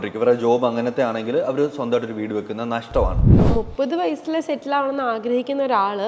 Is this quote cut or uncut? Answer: cut